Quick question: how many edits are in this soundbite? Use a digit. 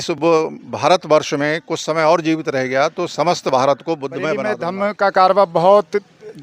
1